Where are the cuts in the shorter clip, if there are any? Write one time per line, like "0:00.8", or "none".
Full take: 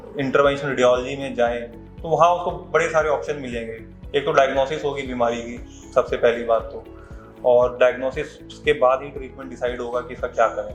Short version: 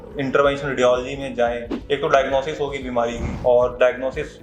0:01.7
0:03.2